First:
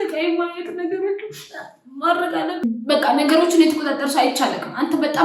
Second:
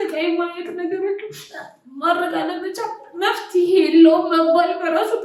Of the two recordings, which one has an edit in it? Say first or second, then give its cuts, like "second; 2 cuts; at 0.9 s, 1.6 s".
first; 1 cut; at 2.5 s